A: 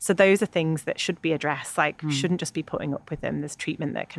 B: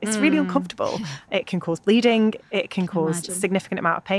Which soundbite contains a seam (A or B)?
B